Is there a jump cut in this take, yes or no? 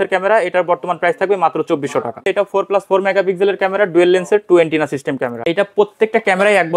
yes